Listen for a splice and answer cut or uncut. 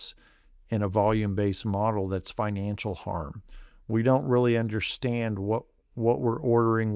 uncut